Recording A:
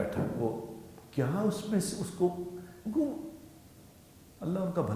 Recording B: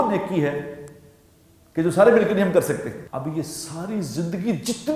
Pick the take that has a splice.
B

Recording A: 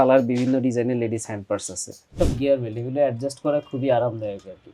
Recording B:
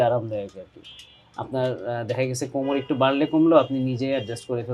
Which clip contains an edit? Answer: A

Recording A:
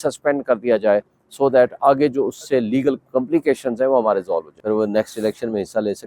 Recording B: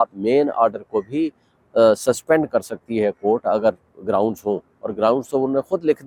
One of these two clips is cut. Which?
A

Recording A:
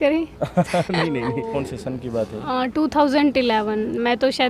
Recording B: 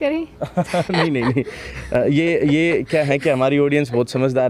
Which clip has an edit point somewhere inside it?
A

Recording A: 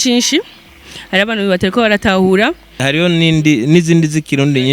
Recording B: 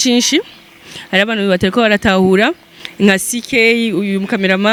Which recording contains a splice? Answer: A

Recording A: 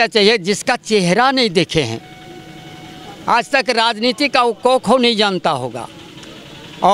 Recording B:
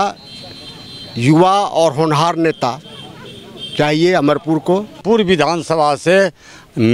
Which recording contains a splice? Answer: B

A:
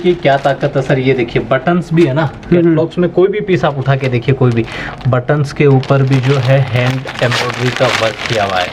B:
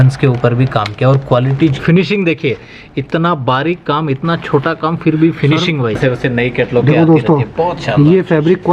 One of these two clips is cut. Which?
B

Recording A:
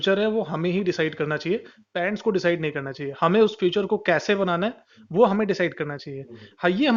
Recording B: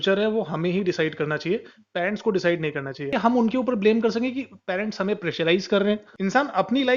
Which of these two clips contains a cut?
B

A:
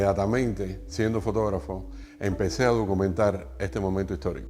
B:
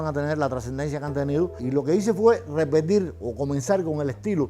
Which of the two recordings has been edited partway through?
B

